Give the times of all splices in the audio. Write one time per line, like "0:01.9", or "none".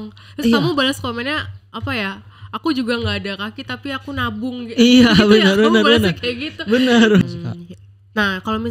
0:07.2